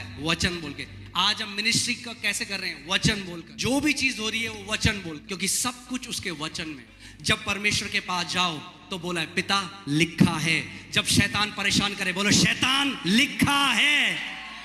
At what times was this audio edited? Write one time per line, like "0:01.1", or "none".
0:03.5
0:05.2
0:06.9